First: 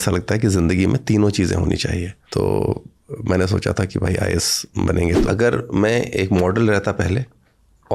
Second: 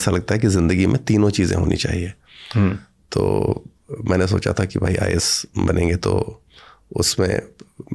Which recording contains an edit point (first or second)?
first